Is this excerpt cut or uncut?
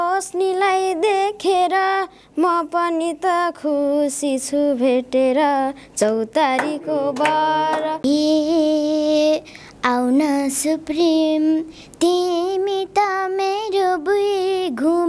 cut